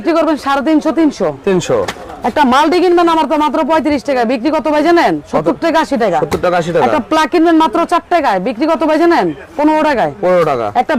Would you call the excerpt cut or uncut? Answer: uncut